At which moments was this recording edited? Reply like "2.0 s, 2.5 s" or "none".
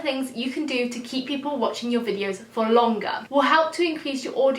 3.3 s